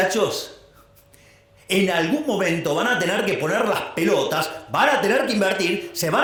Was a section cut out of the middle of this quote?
no; 0 cuts

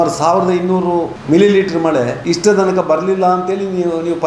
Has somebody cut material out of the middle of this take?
yes; 2 cuts; at 1.2 s, 2.2 s

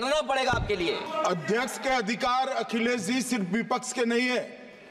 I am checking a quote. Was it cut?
yes; 1 cut; at 1.0 s

